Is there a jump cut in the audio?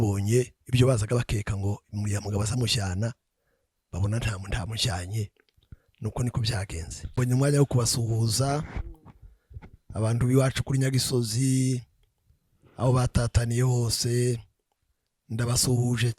yes; 1 cut; at 7.2 s

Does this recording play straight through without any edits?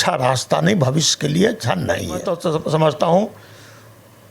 no; 1 cut; at 2.3 s

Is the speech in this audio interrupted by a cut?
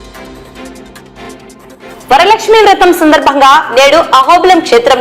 yes; 1 cut; at 1.5 s

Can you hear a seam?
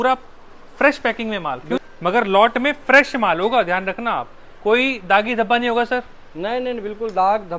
yes; 1 cut; at 1.8 s

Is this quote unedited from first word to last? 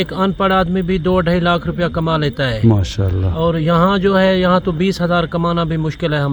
yes; 0 cuts

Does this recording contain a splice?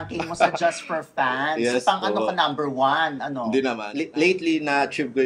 yes; 1 cut; at 3.9 s

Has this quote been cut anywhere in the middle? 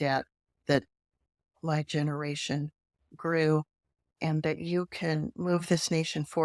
yes; 1 cut; at 4.1 s

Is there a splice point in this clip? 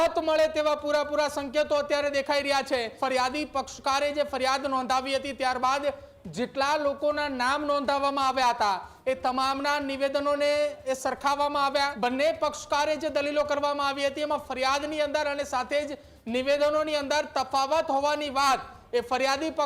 yes; 2 cuts; at 2.9 s, 11.9 s

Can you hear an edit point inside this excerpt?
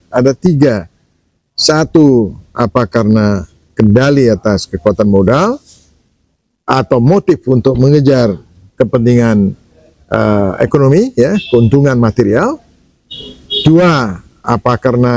no; 0 cuts

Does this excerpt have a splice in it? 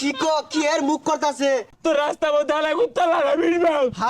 yes; 1 cut; at 1.7 s

